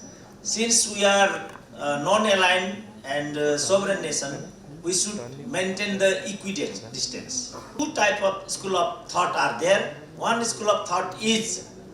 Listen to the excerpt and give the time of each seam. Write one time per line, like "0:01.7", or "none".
0:07.7

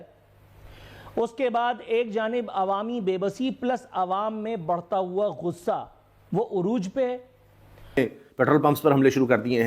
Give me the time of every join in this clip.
0:08.0

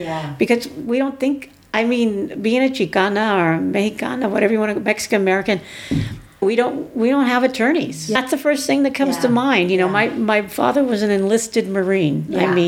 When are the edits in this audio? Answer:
0:06.4
0:08.2

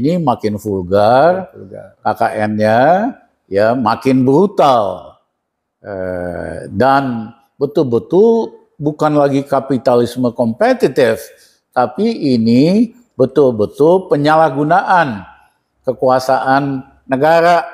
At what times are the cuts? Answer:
none

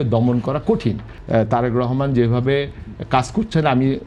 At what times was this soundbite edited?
0:01.1

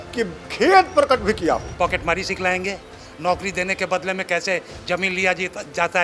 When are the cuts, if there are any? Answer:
0:01.7

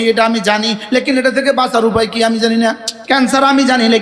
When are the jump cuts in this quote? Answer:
0:02.9

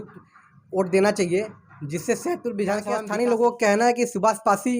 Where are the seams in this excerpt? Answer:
0:03.0

